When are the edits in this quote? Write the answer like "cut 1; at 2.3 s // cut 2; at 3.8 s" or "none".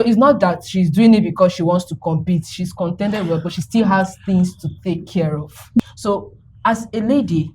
cut 1; at 5.8 s